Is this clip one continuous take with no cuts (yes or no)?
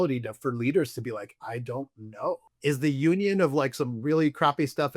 no